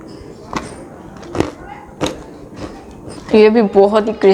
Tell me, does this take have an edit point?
yes; 1 cut; at 3.2 s

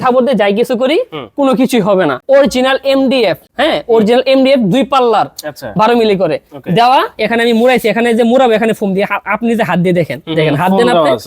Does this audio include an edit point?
yes; 2 cuts; at 2.2 s, 3.5 s

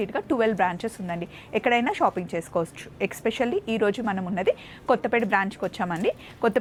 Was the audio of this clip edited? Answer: no; 0 cuts

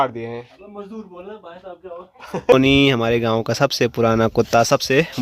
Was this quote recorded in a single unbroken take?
no; 1 cut; at 2.5 s

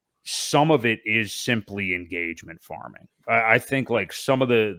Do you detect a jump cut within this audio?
no; 0 cuts

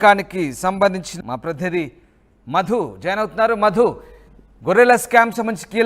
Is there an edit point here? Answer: yes; 1 cut; at 1.1 s

